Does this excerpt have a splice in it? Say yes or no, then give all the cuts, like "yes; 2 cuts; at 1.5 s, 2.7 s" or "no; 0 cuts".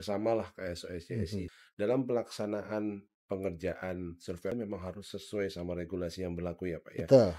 yes; 2 cuts; at 1.5 s, 4.5 s